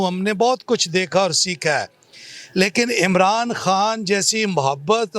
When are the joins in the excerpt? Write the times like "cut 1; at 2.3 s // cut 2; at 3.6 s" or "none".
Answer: none